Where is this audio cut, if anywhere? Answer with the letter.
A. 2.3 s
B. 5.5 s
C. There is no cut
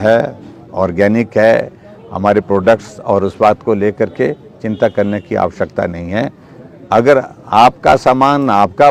C